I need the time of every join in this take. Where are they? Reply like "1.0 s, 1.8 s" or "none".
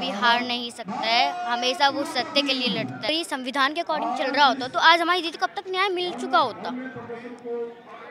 3.1 s